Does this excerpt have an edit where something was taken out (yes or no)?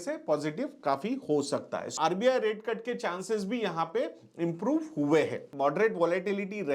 yes